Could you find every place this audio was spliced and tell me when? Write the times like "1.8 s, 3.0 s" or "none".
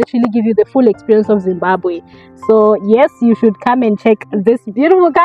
none